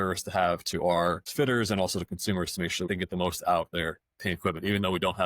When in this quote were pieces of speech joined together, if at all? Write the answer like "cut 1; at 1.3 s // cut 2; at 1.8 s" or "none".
cut 1; at 1.2 s // cut 2; at 2.9 s